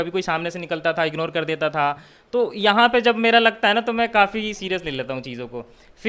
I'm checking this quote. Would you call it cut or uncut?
uncut